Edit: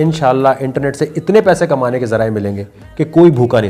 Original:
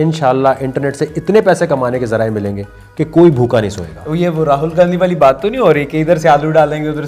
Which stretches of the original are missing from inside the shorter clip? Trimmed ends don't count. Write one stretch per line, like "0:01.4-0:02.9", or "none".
none